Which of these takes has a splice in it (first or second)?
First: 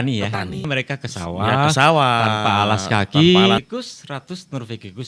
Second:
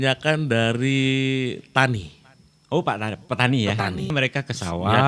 first